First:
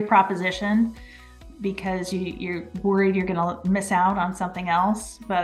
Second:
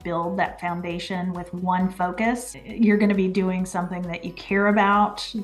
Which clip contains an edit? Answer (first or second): second